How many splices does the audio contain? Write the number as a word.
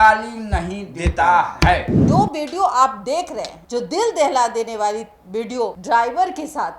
one